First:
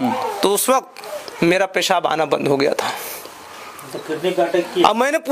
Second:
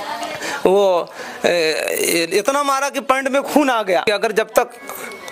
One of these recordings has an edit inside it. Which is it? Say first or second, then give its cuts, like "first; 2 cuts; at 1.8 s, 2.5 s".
second; 1 cut; at 4.0 s